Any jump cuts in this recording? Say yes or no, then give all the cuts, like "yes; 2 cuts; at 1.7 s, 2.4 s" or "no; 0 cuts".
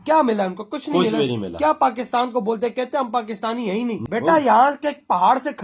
yes; 1 cut; at 4.0 s